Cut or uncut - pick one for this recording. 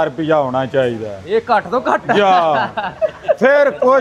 uncut